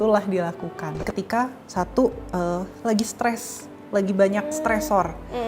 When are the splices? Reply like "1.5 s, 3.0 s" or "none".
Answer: 1.0 s